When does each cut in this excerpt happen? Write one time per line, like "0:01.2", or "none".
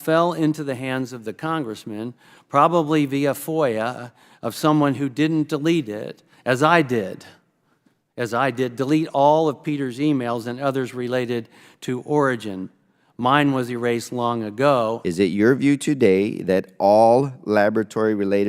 0:15.0